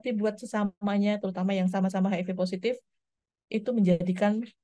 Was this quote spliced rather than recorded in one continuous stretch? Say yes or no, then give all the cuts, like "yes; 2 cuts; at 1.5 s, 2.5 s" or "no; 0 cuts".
no; 0 cuts